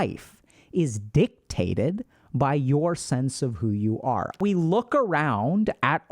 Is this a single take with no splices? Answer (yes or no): no